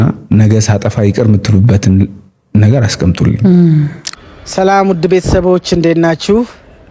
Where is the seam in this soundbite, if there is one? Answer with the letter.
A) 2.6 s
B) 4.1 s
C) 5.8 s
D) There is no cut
B